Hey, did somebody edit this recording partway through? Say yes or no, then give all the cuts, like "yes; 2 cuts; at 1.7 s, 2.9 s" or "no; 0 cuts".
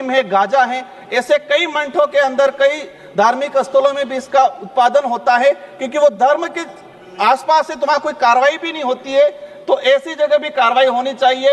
no; 0 cuts